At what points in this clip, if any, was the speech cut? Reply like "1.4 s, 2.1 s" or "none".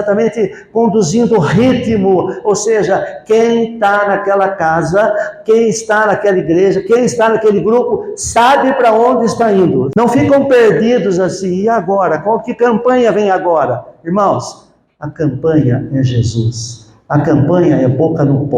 9.9 s